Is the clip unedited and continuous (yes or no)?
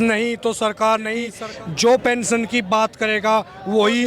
no